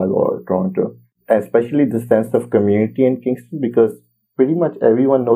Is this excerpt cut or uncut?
cut